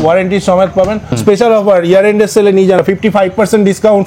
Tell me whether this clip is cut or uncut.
cut